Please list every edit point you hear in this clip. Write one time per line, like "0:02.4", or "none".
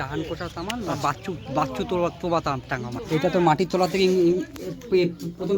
0:03.0